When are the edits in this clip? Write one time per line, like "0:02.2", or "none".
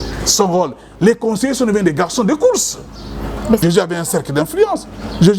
0:03.6